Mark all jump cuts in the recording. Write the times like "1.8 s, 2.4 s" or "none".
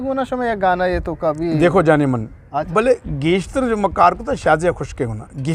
2.7 s